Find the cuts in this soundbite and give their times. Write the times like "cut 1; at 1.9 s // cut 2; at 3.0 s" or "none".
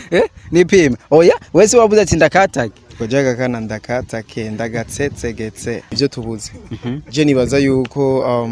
cut 1; at 5.9 s